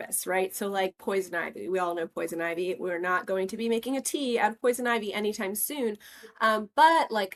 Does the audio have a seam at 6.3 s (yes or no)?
no